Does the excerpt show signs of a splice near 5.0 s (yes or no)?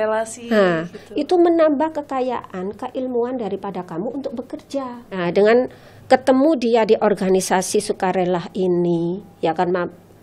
yes